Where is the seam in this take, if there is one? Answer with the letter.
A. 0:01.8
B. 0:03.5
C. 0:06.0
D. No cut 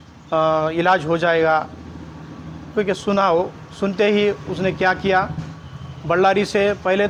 D